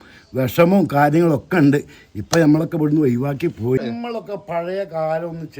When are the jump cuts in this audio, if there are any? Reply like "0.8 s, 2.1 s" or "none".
3.8 s